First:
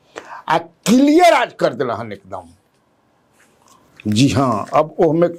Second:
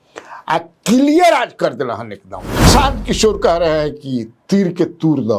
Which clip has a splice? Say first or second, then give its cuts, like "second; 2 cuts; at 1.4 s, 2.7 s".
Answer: second; 1 cut; at 2.7 s